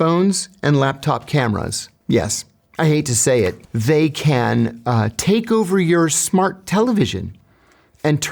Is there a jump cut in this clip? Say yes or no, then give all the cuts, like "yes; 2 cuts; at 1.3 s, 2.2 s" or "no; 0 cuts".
yes; 1 cut; at 3.7 s